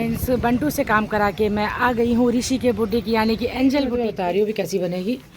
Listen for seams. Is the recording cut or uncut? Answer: cut